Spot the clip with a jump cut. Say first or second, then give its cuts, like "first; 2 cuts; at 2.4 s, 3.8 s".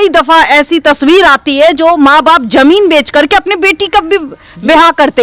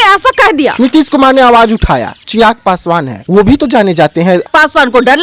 second; 4 cuts; at 0.7 s, 2.2 s, 3.2 s, 4.4 s